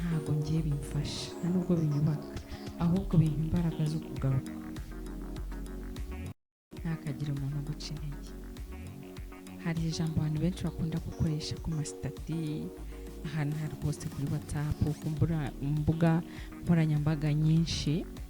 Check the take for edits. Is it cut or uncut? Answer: cut